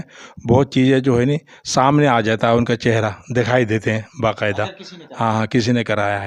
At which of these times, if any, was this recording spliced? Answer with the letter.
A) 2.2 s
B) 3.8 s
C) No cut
C